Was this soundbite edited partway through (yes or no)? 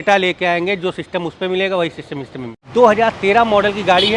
yes